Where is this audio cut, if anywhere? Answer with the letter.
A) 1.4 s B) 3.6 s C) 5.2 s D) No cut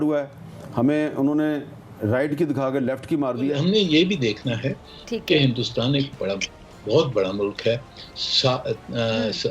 B